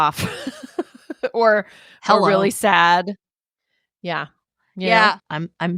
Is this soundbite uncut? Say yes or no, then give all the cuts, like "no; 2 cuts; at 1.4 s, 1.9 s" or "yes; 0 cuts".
yes; 0 cuts